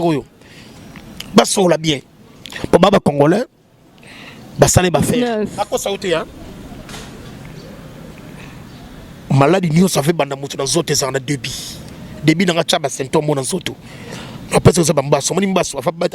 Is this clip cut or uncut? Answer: cut